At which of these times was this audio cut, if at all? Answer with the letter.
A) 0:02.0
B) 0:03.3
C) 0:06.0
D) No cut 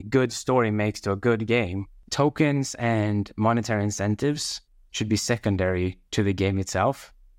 A